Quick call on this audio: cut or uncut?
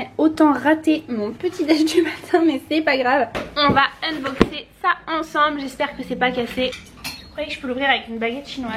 cut